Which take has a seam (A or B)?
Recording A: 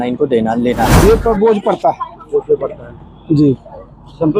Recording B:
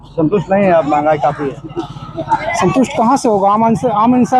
A